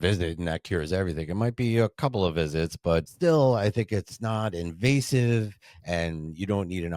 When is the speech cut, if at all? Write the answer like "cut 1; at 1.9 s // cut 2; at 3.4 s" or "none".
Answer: cut 1; at 3.1 s